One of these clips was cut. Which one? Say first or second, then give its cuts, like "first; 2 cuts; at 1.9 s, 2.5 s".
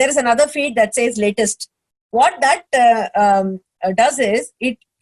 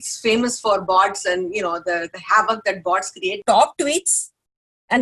second; 1 cut; at 3.4 s